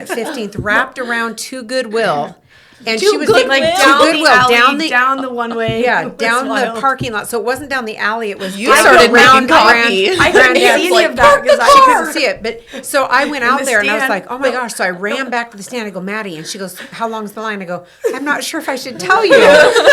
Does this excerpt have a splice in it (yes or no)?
no